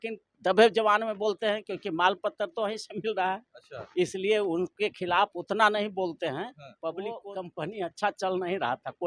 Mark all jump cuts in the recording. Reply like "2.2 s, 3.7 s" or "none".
7.3 s

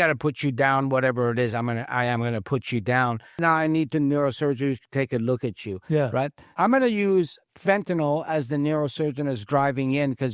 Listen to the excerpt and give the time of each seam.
3.3 s, 6.4 s

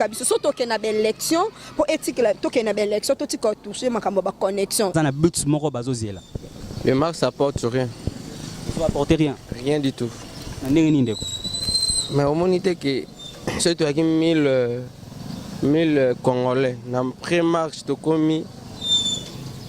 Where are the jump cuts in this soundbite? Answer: 4.9 s

